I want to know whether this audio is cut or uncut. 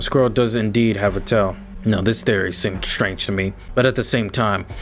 cut